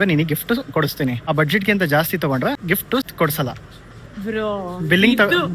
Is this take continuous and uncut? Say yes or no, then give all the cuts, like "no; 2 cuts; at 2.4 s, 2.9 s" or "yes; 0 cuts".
no; 2 cuts; at 1.2 s, 2.8 s